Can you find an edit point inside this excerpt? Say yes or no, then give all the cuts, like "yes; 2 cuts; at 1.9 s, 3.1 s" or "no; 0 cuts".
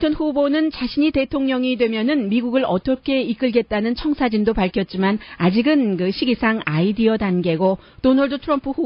no; 0 cuts